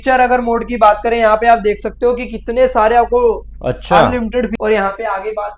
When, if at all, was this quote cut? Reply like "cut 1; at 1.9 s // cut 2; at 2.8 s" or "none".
cut 1; at 4.6 s